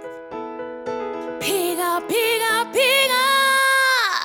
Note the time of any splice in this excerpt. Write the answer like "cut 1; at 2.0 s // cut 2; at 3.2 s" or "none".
none